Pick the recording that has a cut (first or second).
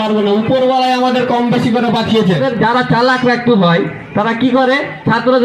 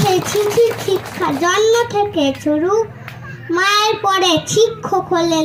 first